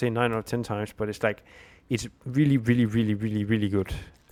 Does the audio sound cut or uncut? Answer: uncut